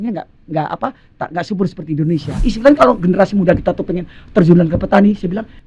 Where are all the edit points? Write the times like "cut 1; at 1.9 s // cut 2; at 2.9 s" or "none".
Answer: cut 1; at 2.4 s